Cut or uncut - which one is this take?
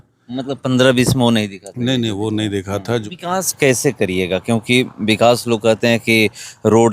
cut